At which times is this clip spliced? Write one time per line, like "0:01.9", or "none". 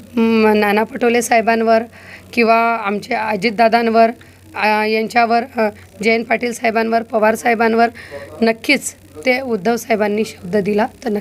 none